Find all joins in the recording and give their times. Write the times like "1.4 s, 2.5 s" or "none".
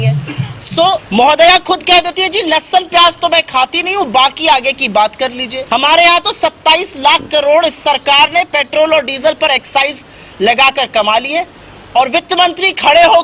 1.0 s, 5.5 s